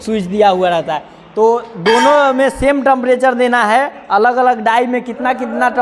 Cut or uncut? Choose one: uncut